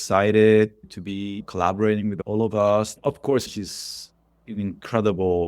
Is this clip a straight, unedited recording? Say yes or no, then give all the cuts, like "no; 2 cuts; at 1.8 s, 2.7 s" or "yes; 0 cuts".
no; 3 cuts; at 1.4 s, 2.2 s, 2.9 s